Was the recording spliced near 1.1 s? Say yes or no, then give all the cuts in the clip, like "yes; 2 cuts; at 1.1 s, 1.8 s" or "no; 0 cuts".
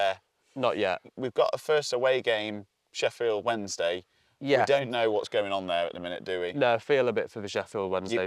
yes; 1 cut; at 1.1 s